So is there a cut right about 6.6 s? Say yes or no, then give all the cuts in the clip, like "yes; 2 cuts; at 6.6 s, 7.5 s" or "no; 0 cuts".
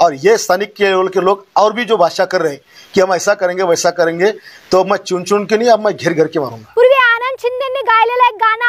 yes; 1 cut; at 6.6 s